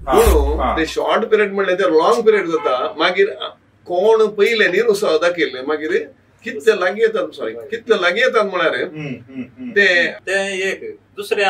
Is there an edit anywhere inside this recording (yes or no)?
yes